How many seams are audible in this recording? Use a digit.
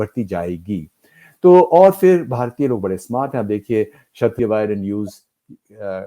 1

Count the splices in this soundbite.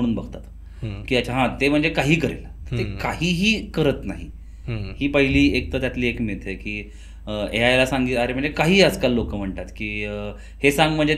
0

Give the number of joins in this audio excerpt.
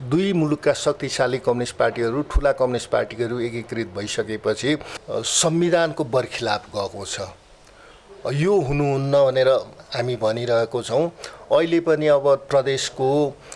1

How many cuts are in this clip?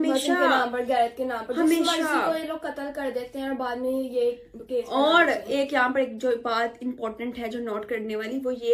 0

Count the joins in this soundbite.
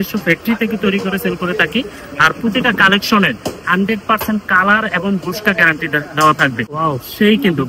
1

